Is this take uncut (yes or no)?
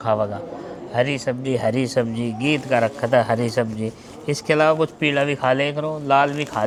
yes